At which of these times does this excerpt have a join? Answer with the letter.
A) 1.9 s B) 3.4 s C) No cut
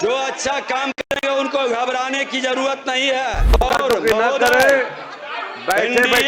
B